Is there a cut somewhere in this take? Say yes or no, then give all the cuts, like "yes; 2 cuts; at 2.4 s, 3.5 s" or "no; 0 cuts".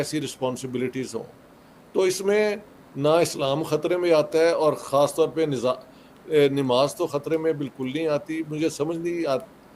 no; 0 cuts